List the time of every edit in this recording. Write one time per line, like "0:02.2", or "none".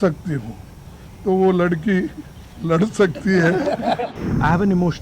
0:04.1